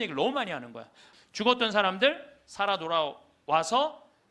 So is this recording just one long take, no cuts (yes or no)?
no